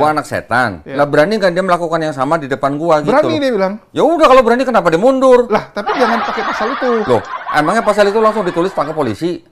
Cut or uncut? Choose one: uncut